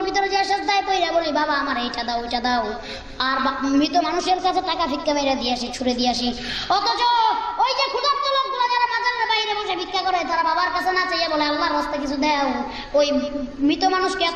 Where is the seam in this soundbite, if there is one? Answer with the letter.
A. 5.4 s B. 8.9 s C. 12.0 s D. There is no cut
D